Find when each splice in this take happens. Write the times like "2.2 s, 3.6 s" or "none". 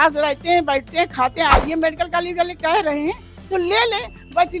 1.6 s